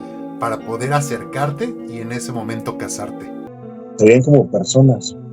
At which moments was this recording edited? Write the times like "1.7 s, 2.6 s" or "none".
3.6 s